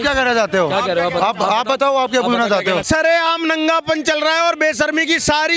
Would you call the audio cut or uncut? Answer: cut